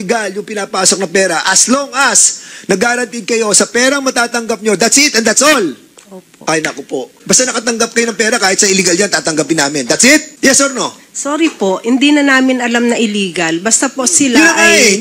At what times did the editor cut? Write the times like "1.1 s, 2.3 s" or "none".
7.2 s, 10.3 s